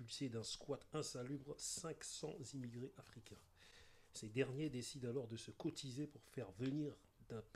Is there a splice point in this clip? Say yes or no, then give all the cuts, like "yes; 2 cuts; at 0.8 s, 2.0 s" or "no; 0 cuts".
no; 0 cuts